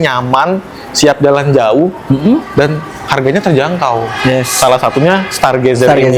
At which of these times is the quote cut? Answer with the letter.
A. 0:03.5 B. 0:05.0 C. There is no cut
C